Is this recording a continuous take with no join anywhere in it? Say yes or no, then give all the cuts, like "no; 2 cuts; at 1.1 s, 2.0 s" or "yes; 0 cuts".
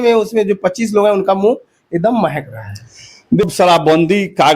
no; 1 cut; at 3.5 s